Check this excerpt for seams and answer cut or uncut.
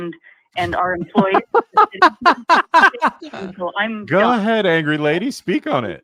uncut